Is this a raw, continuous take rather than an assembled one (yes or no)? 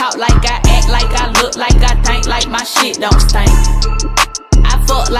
yes